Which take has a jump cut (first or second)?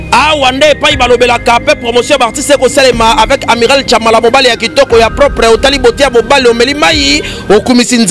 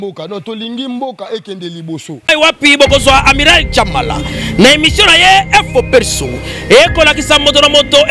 second